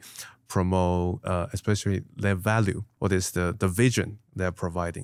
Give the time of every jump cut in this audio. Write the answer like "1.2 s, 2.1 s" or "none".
none